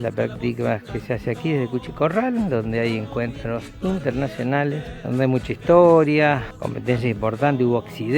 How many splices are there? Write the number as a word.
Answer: one